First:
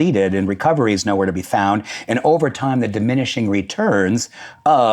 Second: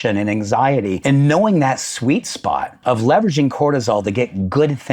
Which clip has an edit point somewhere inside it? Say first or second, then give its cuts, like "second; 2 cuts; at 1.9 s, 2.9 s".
second; 2 cuts; at 1.0 s, 2.7 s